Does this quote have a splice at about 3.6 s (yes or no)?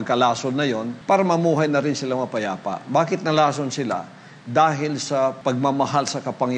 no